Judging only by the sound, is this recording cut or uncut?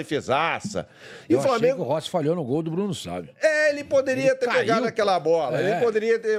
uncut